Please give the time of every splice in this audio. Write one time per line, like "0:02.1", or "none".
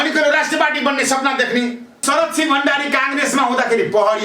0:02.0

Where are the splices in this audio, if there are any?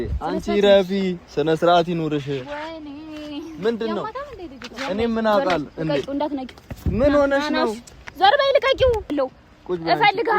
0:09.1

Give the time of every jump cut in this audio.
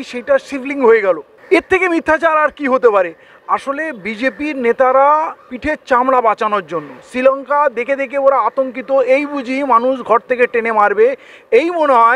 none

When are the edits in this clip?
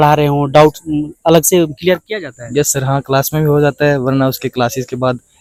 none

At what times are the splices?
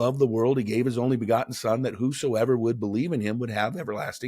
none

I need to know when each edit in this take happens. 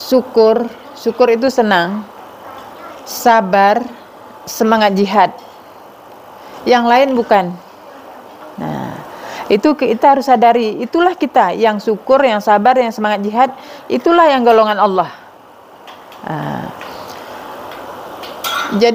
none

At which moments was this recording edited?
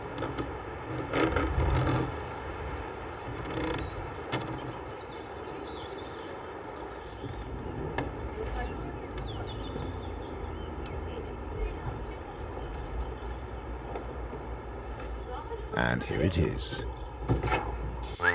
none

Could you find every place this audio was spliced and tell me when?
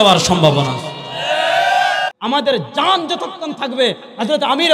0:02.1

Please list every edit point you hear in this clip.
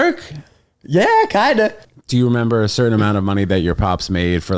0:01.9

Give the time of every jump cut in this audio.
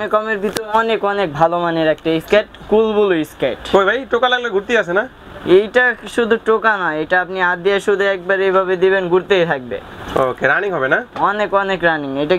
none

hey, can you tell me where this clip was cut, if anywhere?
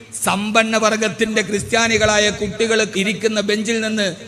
0:02.9

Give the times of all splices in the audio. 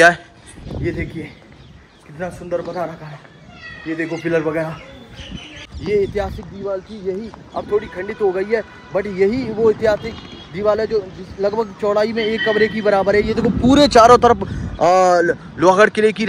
0:05.6

